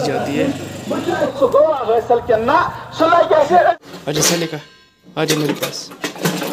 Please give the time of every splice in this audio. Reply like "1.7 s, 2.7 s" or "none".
1.3 s, 3.8 s